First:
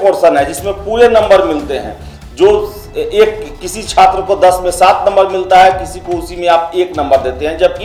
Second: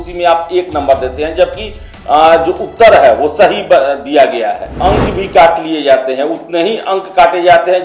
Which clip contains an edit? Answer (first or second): second